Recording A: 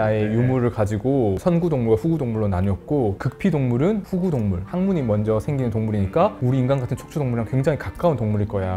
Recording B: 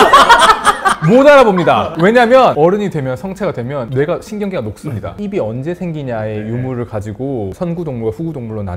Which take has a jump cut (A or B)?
B